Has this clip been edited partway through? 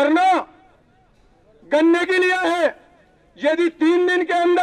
no; 0 cuts

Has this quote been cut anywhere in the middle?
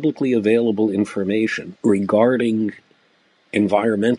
yes; 1 cut; at 1.7 s

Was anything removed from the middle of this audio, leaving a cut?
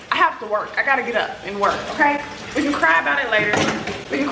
no; 0 cuts

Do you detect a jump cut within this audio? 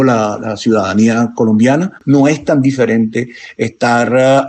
yes; 1 cut; at 2.0 s

